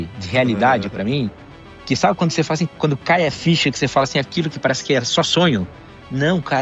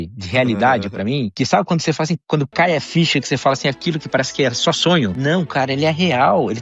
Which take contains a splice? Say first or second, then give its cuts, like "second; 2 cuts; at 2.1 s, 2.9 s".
second; 2 cuts; at 1.3 s, 5.2 s